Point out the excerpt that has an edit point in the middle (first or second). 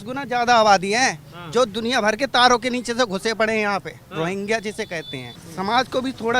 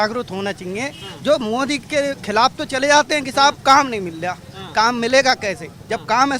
first